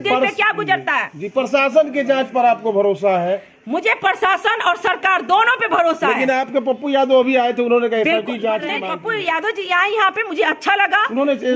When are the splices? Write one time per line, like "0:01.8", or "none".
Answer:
0:08.9